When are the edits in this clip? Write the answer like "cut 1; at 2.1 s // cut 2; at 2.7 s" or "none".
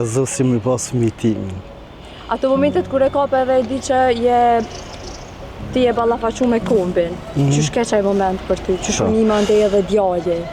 none